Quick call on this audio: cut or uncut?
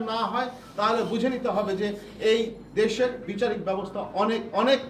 uncut